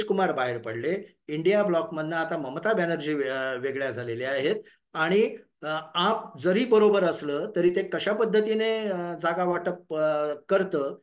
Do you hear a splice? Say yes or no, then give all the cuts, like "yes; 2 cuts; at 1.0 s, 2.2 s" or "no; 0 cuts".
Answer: no; 0 cuts